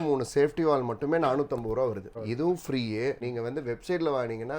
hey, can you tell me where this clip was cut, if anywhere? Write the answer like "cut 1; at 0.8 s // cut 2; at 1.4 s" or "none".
cut 1; at 2.1 s // cut 2; at 3.2 s